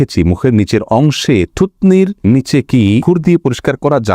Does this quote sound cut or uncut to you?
cut